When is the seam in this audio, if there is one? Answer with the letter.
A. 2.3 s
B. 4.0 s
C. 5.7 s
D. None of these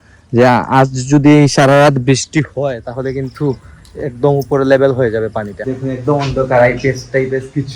C